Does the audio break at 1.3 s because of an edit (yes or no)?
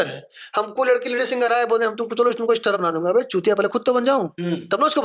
no